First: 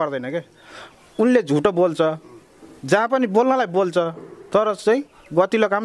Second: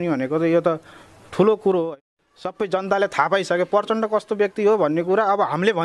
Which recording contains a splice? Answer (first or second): second